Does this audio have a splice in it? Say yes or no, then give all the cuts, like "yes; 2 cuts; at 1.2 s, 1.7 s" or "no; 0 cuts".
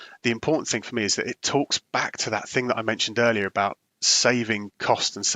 no; 0 cuts